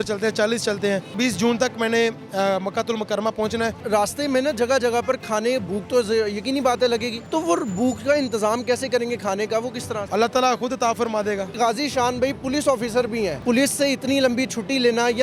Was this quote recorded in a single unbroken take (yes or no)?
no